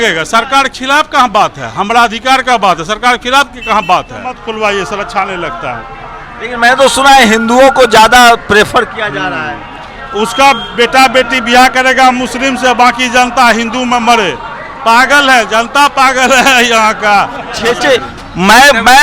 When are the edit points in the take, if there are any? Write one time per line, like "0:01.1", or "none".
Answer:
0:04.4
0:17.6